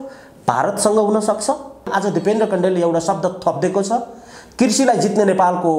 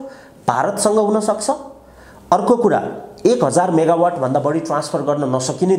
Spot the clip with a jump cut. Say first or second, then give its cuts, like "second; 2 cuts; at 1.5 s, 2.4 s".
first; 1 cut; at 1.9 s